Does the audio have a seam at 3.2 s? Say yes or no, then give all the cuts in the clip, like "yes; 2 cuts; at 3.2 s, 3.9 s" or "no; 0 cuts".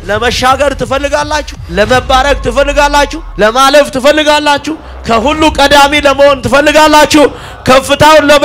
yes; 2 cuts; at 1.6 s, 3.2 s